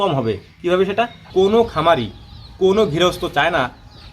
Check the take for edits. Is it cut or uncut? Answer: cut